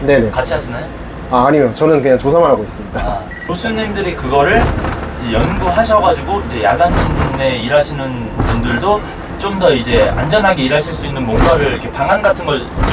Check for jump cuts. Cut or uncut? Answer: uncut